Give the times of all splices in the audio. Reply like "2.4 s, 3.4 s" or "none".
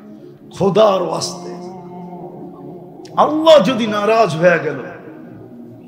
1.2 s, 3.1 s